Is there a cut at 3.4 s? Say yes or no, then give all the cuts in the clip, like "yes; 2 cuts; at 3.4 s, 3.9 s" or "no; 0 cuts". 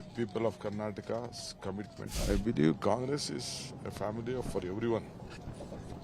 no; 1 cut; at 2.0 s